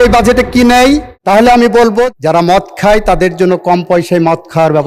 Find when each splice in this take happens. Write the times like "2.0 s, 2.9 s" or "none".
1.1 s, 2.1 s